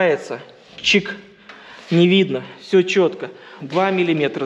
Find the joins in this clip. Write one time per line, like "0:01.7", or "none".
0:03.5

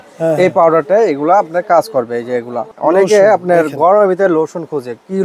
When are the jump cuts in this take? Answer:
0:02.7

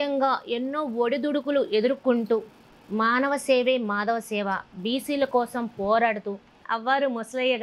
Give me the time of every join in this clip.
0:06.6

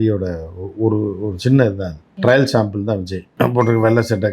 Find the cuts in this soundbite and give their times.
none

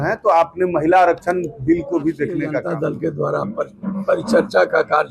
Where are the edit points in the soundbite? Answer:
0:02.6

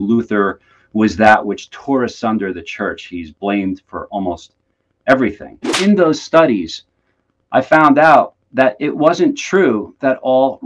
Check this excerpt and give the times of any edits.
0:05.8

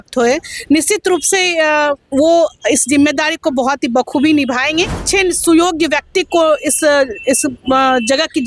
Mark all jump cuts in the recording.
0:05.0

